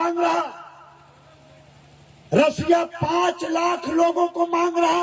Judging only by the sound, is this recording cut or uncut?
uncut